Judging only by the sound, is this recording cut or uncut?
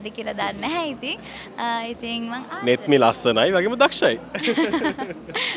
uncut